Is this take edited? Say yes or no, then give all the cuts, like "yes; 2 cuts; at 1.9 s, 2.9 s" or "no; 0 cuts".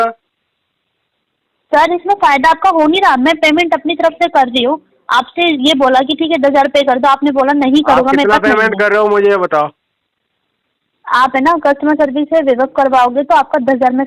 no; 0 cuts